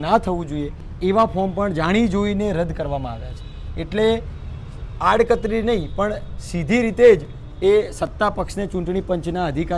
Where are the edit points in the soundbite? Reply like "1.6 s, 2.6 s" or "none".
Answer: none